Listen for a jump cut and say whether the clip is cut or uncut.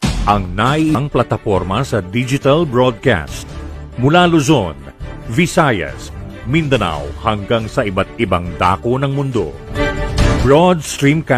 cut